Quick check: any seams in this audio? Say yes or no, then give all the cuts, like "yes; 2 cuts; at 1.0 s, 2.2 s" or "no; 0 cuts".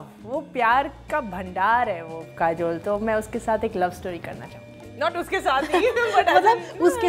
no; 0 cuts